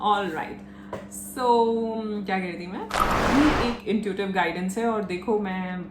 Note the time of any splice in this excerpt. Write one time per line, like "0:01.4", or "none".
0:03.2